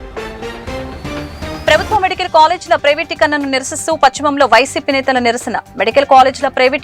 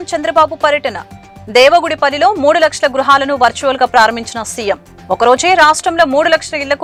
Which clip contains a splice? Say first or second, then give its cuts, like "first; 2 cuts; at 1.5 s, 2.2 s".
first; 1 cut; at 1.6 s